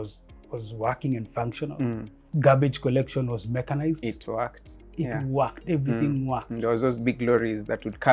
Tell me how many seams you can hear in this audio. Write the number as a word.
one